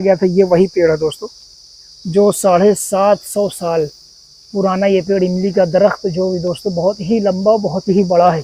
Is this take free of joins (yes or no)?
yes